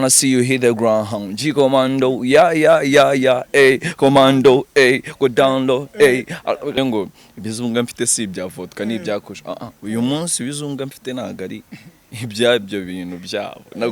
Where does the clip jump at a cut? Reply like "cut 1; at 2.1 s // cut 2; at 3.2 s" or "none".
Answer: cut 1; at 6.7 s